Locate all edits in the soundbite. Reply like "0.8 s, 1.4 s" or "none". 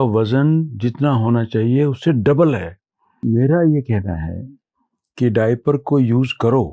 3.2 s